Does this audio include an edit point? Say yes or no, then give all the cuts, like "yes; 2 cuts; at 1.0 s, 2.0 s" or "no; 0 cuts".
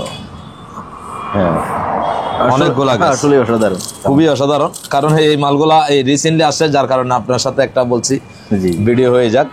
no; 0 cuts